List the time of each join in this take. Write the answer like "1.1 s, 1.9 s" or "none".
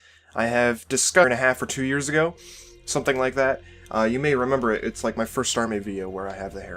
none

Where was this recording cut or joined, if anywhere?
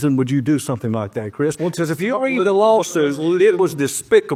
none

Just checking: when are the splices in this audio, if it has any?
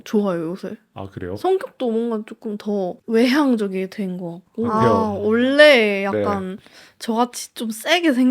3.0 s, 4.7 s

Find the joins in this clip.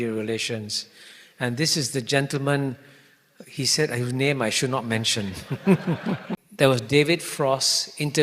6.4 s

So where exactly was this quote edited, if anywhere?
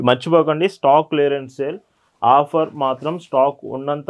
none

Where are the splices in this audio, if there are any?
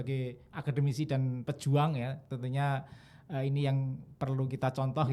none

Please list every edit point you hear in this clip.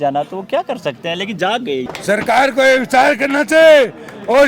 1.9 s

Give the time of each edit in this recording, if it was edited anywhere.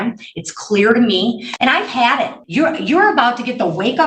1.5 s, 2.4 s

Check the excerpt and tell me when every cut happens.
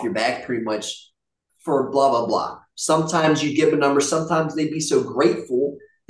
none

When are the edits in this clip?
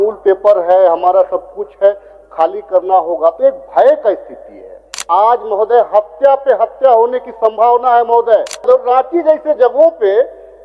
5.0 s, 8.7 s

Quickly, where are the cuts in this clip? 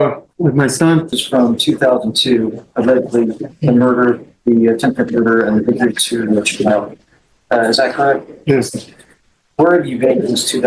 1.2 s

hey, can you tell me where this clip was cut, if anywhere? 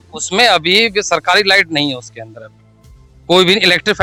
none

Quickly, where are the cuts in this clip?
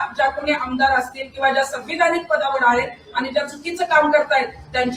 none

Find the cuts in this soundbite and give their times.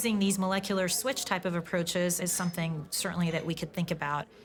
none

